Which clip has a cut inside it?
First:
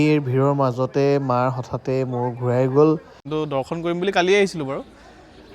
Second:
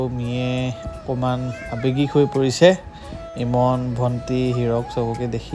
first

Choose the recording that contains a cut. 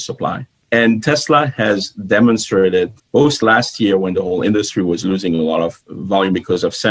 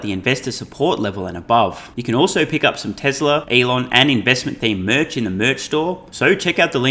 second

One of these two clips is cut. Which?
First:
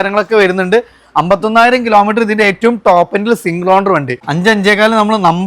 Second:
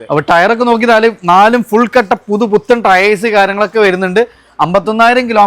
first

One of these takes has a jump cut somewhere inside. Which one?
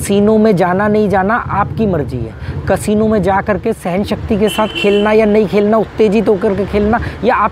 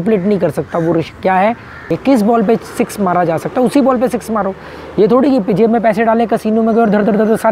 second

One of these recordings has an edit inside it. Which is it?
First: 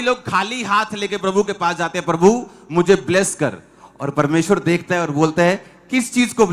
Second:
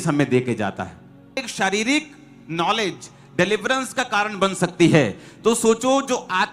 second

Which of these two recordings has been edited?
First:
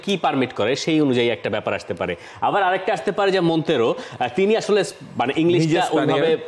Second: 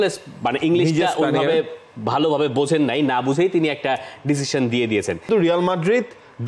second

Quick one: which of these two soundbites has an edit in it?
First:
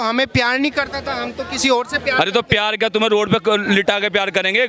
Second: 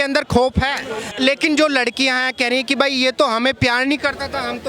second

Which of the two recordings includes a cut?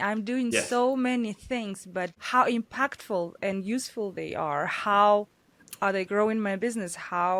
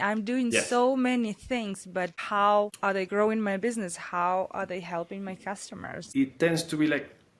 second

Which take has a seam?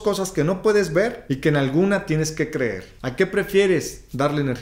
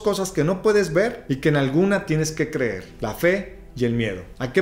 first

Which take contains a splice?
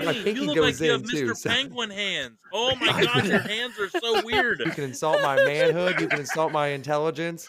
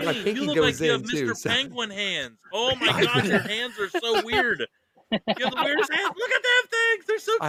first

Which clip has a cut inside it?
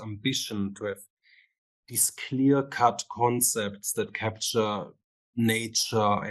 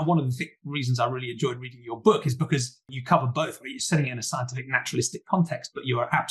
second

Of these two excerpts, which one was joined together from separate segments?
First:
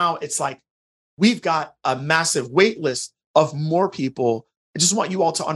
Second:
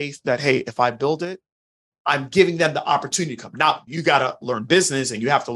second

